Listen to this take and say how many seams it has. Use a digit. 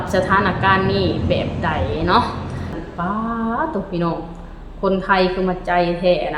1